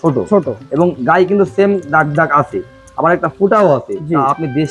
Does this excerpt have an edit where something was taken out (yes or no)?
no